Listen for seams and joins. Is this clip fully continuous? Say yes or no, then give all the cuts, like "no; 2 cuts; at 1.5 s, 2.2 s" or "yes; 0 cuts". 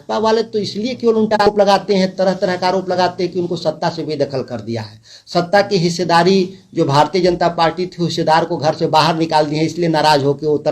no; 1 cut; at 1.5 s